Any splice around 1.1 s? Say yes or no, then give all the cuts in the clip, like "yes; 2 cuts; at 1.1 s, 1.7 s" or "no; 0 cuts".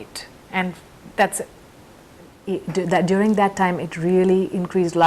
no; 1 cut; at 2.4 s